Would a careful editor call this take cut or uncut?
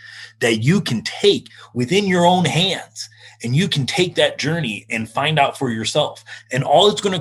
cut